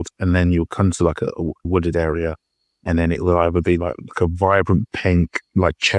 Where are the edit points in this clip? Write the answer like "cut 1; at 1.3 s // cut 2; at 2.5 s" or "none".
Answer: cut 1; at 1.6 s